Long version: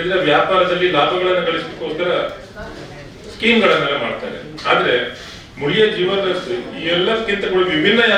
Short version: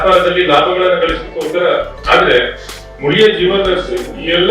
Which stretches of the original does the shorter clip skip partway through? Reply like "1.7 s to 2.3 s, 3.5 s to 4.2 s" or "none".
2.4 s to 4.5 s